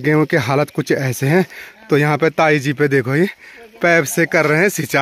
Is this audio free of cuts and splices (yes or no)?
yes